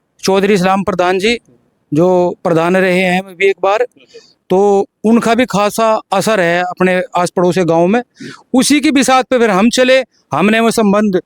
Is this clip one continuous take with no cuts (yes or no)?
yes